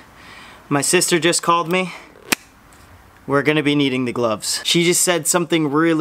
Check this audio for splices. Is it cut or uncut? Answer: uncut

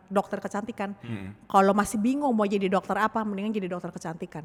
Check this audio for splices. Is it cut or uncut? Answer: uncut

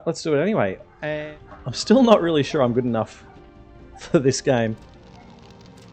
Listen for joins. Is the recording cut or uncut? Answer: cut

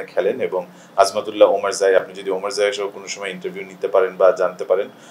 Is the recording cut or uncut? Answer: uncut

